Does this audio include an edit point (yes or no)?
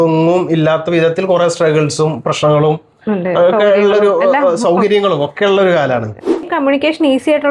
yes